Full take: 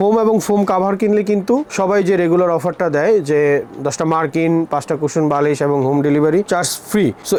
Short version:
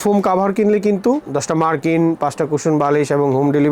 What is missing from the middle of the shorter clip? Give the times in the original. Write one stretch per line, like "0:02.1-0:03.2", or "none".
0:01.7-0:03.7